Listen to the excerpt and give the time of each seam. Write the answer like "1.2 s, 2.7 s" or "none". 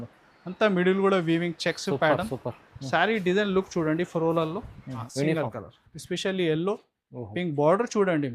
5.1 s